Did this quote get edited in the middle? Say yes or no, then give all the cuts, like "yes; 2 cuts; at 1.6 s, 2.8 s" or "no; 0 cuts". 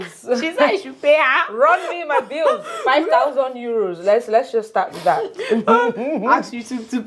no; 0 cuts